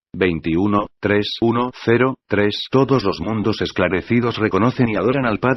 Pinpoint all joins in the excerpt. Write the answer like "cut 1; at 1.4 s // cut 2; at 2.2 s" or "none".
cut 1; at 0.9 s